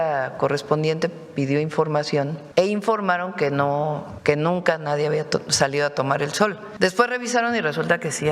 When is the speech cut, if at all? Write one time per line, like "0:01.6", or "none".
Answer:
0:02.4
0:04.1
0:06.6